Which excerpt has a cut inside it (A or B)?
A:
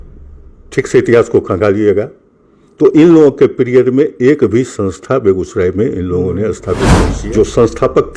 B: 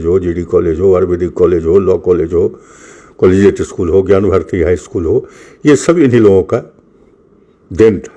A